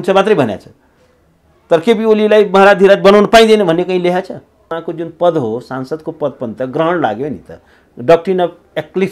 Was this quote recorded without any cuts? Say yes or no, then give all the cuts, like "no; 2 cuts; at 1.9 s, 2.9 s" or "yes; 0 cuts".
no; 1 cut; at 4.8 s